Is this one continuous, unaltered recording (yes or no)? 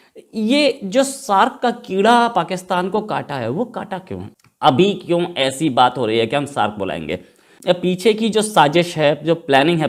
yes